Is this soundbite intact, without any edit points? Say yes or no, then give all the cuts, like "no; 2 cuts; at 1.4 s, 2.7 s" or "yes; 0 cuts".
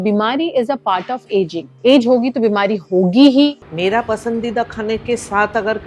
no; 1 cut; at 3.6 s